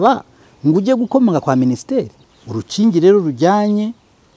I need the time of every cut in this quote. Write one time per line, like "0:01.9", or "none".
0:02.2